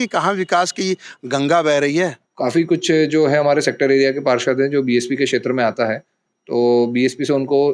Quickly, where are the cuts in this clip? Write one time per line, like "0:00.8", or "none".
0:02.2